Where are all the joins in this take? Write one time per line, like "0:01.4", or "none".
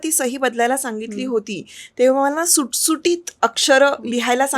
0:03.3